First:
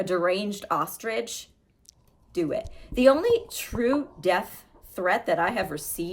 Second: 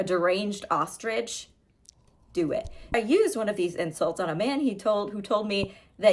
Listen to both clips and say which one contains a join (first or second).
second